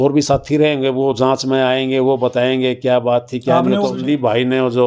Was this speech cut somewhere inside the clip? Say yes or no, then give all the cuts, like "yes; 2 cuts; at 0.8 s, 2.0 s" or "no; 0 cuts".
yes; 1 cut; at 4.0 s